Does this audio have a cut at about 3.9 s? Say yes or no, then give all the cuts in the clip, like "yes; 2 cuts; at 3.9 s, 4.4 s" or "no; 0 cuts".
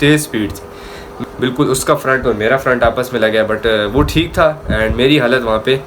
no; 1 cut; at 1.1 s